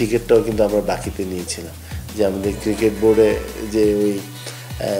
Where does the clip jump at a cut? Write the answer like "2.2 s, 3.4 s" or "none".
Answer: none